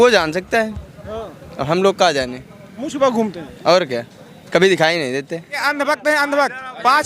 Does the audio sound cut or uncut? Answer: cut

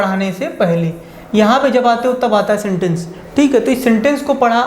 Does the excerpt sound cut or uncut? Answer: uncut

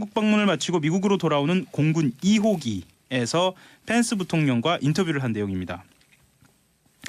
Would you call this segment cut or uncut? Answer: uncut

